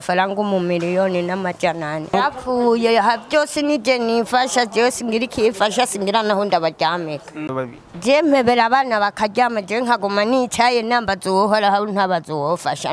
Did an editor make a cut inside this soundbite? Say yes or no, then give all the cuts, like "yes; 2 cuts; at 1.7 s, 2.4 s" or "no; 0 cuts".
yes; 2 cuts; at 2.1 s, 7.5 s